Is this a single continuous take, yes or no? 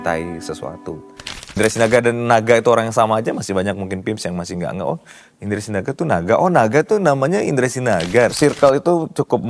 no